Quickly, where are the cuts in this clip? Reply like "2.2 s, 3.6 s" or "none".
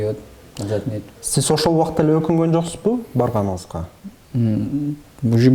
none